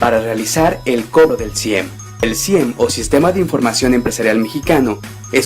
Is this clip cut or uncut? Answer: cut